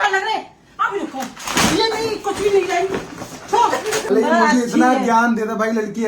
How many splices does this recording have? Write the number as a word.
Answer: one